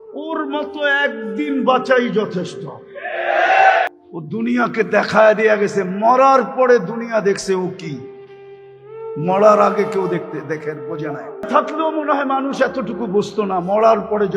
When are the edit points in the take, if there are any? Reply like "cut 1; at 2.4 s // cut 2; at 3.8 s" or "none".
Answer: cut 1; at 4.0 s // cut 2; at 11.5 s